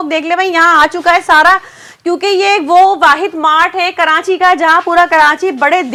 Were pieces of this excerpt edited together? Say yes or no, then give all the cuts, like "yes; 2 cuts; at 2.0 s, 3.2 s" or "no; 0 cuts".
no; 0 cuts